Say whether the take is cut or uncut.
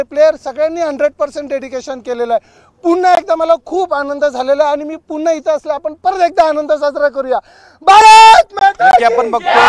uncut